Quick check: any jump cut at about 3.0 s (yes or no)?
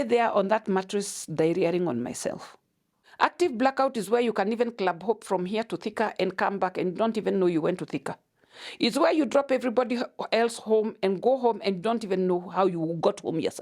yes